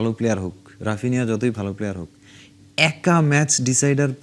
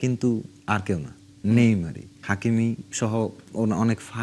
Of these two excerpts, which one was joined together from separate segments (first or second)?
second